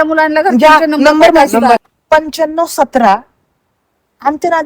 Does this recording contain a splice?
yes; 1 cut; at 1.9 s

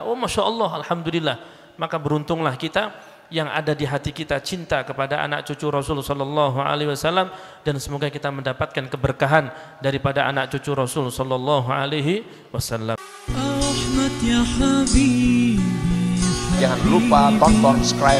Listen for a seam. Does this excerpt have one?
yes; 1 cut; at 13.0 s

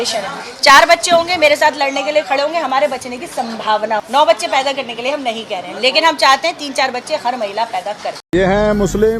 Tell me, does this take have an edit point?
yes; 2 cuts; at 4.1 s, 8.2 s

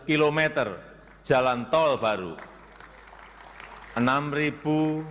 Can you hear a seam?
no; 0 cuts

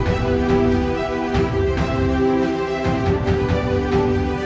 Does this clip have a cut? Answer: no; 0 cuts

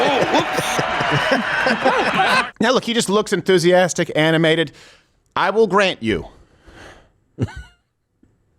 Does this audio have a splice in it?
yes; 1 cut; at 2.5 s

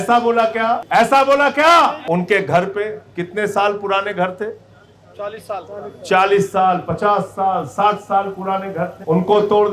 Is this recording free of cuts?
no; 2 cuts; at 0.8 s, 2.0 s

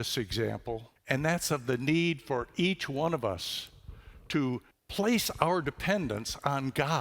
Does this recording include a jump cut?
yes; 2 cuts; at 0.9 s, 4.8 s

